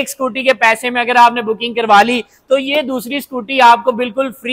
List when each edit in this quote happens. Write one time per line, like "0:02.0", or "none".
none